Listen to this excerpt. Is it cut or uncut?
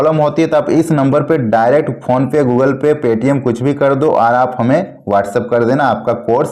uncut